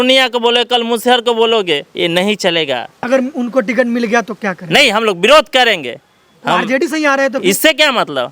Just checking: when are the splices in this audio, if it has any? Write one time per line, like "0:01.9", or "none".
none